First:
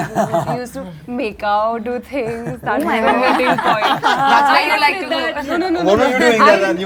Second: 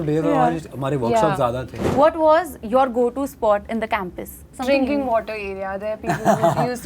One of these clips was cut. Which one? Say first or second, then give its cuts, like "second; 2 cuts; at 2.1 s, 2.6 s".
second; 2 cuts; at 1.8 s, 4.5 s